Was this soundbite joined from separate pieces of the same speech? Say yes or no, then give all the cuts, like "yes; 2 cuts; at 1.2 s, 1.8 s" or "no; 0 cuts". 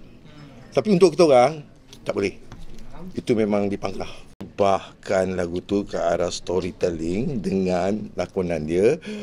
yes; 1 cut; at 4.5 s